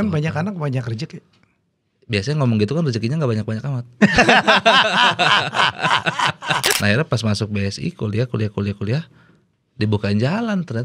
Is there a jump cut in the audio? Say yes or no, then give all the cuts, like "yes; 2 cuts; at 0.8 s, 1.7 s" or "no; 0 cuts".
yes; 1 cut; at 6.7 s